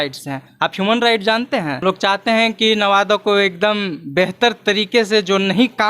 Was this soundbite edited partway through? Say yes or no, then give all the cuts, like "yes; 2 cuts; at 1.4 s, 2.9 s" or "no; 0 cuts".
yes; 1 cut; at 1.8 s